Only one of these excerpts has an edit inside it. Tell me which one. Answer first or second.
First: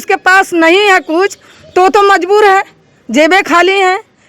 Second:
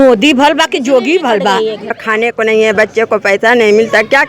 second